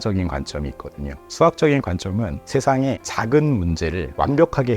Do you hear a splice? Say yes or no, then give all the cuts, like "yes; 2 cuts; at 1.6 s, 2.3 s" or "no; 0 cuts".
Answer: yes; 1 cut; at 1.2 s